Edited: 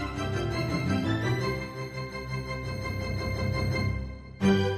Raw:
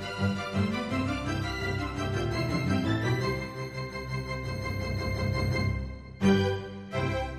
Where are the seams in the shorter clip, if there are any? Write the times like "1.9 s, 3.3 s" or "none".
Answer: none